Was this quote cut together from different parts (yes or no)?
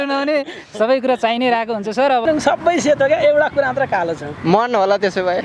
yes